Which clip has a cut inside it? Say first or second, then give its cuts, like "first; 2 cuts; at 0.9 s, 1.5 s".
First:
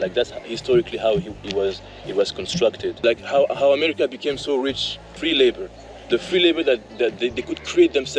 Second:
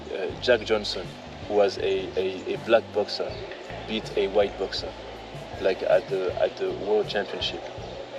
first; 2 cuts; at 3.0 s, 5.1 s